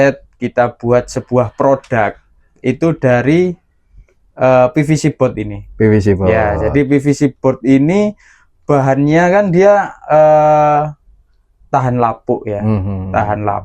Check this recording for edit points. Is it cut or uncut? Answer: uncut